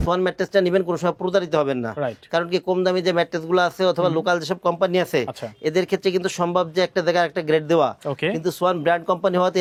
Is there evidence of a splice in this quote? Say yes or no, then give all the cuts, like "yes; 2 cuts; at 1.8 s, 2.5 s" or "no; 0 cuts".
no; 0 cuts